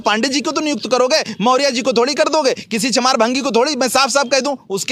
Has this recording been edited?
no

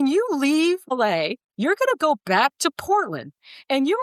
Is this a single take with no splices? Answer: no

